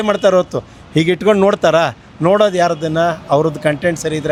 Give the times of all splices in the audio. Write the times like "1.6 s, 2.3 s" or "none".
none